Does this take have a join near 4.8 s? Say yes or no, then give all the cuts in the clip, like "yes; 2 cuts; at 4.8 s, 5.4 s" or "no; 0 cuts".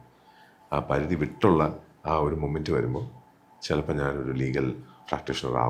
no; 0 cuts